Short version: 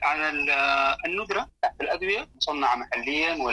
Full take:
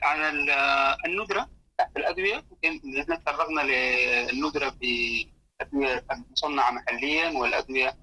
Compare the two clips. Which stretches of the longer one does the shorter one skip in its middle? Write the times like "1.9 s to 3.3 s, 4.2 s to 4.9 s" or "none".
1.5 s to 1.7 s, 2.5 s to 6.3 s